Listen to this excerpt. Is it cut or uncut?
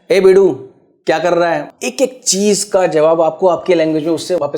cut